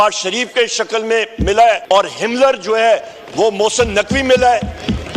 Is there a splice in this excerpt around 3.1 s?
no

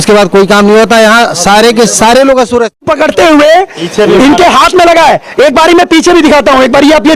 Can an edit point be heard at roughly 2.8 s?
yes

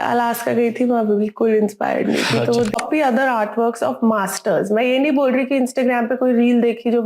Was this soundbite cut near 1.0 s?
no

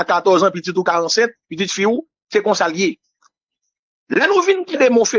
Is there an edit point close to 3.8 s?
no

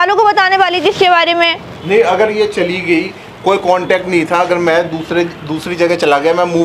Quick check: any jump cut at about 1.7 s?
yes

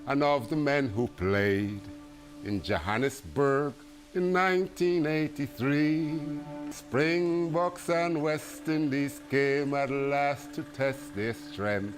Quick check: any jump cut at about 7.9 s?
no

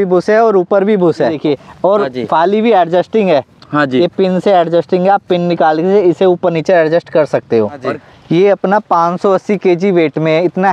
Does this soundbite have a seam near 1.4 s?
yes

